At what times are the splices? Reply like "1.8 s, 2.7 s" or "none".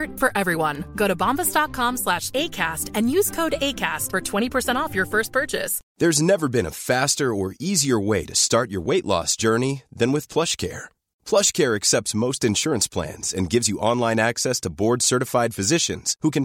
5.8 s